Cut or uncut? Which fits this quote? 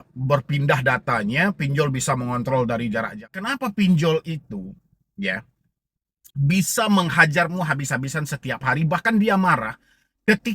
cut